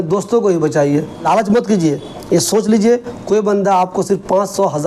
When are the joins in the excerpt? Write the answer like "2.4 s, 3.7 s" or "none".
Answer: 1.3 s